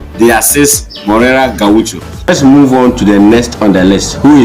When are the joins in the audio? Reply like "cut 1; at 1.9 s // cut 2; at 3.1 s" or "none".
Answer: cut 1; at 2.3 s

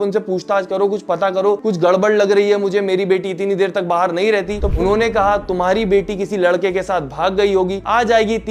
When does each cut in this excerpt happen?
cut 1; at 4.7 s

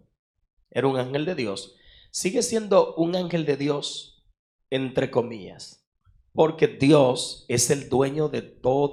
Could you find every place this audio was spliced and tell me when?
none

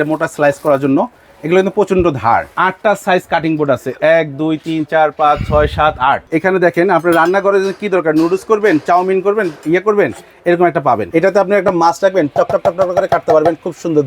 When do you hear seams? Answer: cut 1; at 2.5 s // cut 2; at 6.3 s // cut 3; at 11.1 s

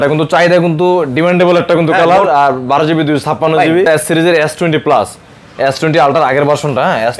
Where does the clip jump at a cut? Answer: cut 1; at 3.9 s

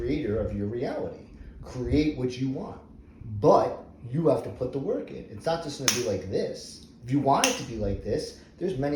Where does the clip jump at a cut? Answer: none

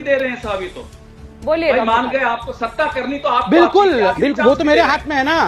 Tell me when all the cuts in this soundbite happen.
none

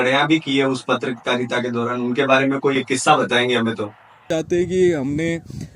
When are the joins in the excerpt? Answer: cut 1; at 4.3 s

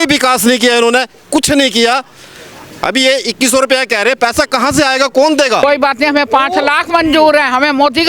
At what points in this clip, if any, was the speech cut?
cut 1; at 5.6 s

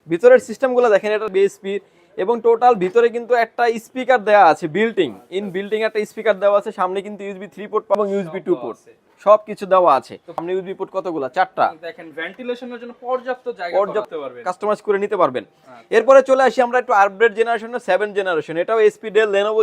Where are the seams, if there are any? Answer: cut 1; at 1.2 s // cut 2; at 7.9 s // cut 3; at 10.4 s // cut 4; at 14.1 s

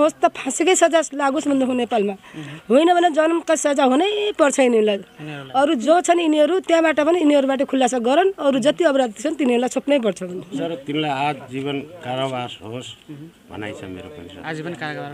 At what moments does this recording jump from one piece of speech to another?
cut 1; at 10.6 s

